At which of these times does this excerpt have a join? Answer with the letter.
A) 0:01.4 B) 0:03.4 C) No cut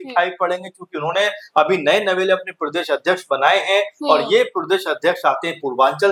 C